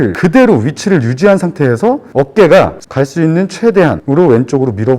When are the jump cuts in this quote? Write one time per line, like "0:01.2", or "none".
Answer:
0:02.8